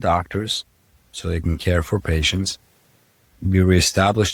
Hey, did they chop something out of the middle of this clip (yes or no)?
no